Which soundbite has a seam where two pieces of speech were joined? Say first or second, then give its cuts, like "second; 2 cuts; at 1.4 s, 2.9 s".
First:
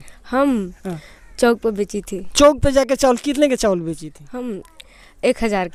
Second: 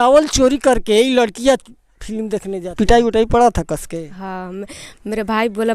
second; 1 cut; at 2.5 s